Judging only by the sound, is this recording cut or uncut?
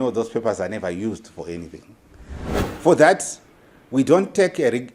cut